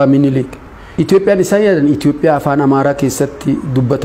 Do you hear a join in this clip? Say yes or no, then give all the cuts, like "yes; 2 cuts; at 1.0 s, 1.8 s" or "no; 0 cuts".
no; 0 cuts